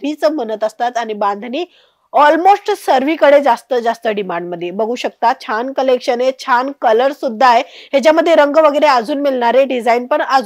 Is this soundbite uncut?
yes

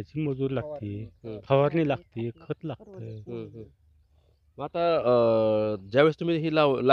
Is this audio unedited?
yes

